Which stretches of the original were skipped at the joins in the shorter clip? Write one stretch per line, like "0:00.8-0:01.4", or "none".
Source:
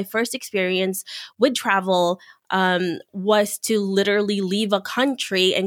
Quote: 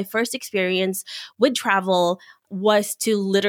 0:02.4-0:03.0